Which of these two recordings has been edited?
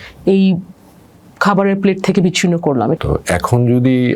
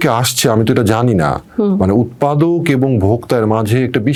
first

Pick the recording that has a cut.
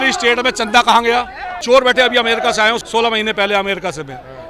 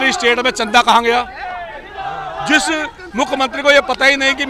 first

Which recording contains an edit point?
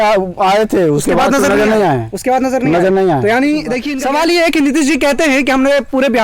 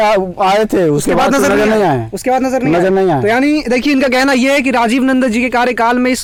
first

